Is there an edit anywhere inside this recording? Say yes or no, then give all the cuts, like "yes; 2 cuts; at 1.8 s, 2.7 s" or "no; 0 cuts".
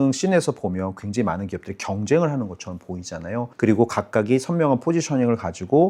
no; 0 cuts